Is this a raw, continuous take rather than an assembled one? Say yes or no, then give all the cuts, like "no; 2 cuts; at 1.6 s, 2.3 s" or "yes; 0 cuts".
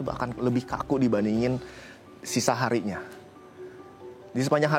yes; 0 cuts